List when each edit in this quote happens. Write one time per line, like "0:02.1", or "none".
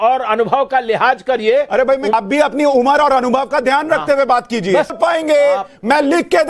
0:02.1
0:04.9